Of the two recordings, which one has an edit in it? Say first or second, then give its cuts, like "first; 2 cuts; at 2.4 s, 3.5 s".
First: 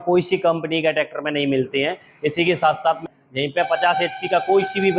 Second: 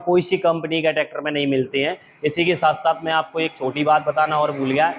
first; 1 cut; at 3.0 s